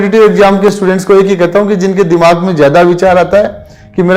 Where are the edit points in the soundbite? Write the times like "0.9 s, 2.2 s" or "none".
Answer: none